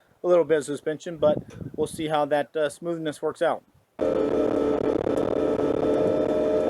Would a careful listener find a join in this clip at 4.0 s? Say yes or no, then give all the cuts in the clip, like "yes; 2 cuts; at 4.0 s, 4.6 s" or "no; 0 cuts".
yes; 1 cut; at 4.0 s